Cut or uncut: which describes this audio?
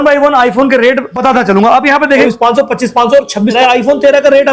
cut